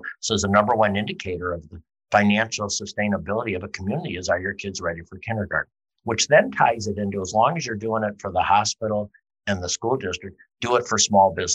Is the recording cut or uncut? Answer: cut